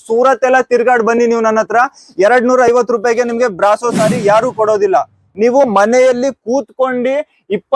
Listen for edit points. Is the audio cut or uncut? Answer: cut